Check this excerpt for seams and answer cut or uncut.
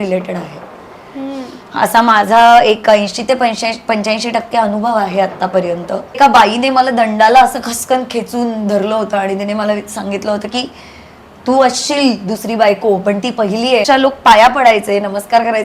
cut